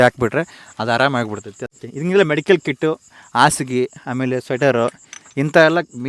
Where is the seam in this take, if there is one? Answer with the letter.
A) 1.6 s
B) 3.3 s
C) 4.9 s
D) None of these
A